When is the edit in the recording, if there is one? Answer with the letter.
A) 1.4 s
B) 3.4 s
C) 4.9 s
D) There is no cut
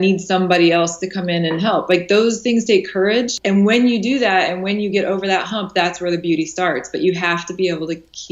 B